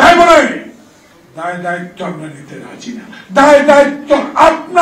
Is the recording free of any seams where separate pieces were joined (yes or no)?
yes